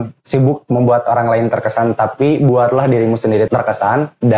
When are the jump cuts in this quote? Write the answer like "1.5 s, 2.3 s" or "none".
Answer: 3.5 s

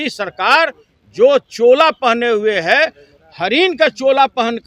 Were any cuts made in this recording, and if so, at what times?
none

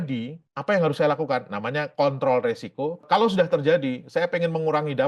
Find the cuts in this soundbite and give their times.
3.0 s

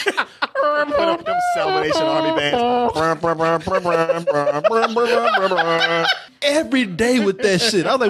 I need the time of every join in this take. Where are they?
6.3 s

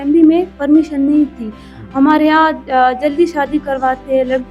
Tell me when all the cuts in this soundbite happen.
none

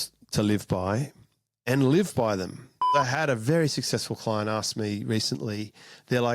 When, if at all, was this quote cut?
2.9 s

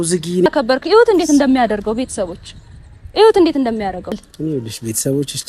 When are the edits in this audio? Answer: 4.1 s

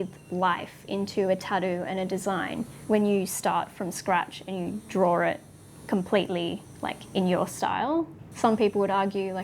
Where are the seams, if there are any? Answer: 2.7 s, 8.2 s

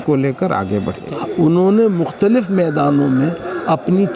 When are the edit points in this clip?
1.0 s

